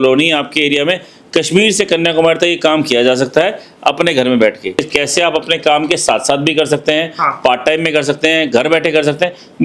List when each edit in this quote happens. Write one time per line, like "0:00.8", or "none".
0:04.8